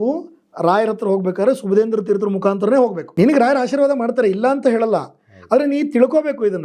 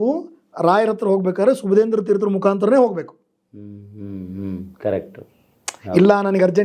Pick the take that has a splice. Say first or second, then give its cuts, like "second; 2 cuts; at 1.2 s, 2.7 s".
first; 1 cut; at 3.0 s